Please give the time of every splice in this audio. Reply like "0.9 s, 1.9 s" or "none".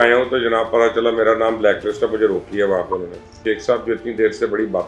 3.4 s